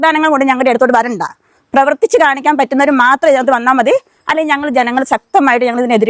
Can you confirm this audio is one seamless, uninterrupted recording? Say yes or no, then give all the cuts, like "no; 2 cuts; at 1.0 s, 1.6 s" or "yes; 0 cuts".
yes; 0 cuts